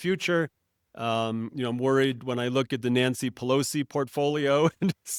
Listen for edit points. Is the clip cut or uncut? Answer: uncut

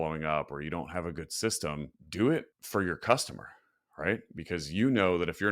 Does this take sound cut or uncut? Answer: cut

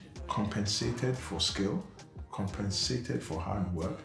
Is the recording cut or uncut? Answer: uncut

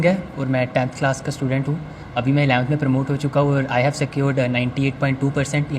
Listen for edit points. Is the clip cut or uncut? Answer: uncut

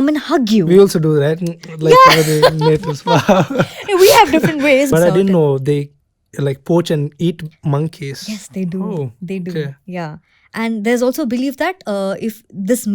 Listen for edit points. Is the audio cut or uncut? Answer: cut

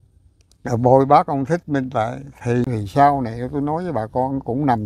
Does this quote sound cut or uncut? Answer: cut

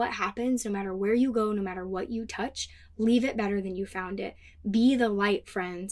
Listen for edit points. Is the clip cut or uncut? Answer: uncut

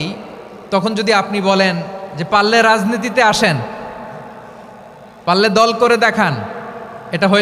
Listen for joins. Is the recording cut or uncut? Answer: uncut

